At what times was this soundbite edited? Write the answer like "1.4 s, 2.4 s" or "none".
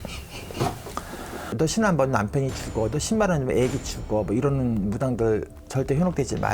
1.5 s, 5.6 s